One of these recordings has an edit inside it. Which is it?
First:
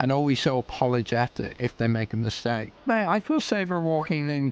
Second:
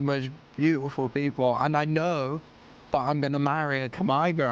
first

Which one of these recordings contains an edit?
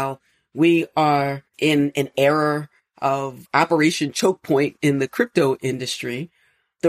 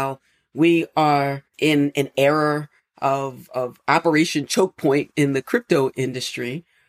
first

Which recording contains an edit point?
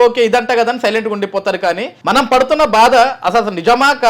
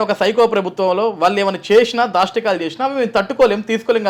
first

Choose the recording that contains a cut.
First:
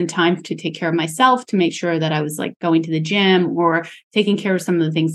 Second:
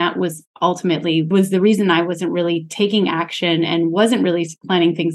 second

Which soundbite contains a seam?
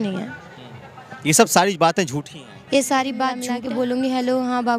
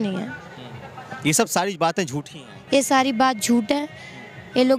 first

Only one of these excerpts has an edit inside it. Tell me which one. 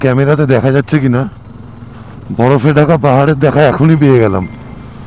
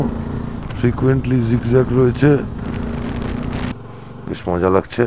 second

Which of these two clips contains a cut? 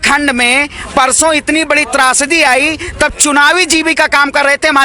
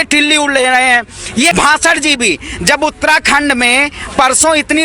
second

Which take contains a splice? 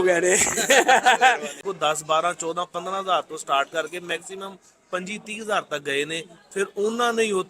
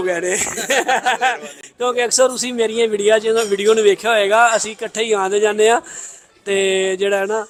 first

